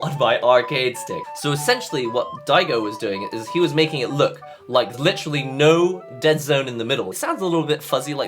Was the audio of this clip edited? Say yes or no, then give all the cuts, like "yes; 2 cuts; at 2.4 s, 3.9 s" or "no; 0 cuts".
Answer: yes; 3 cuts; at 1.2 s, 4.9 s, 7.1 s